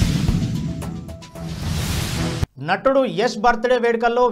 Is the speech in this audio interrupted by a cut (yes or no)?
no